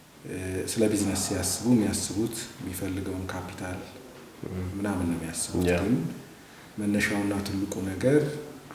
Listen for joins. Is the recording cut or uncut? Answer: uncut